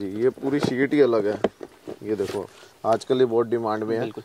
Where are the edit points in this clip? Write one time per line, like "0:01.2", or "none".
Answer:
none